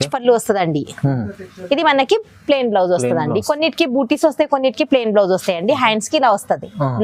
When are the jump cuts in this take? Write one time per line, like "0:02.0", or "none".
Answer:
none